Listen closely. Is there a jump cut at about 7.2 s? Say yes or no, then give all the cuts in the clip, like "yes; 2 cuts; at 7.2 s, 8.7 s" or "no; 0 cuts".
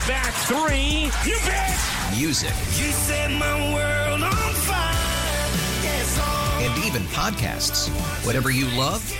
no; 0 cuts